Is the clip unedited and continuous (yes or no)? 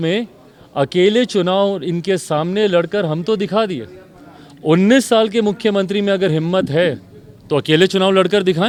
yes